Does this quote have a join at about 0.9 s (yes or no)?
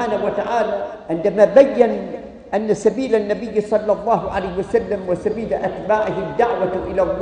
yes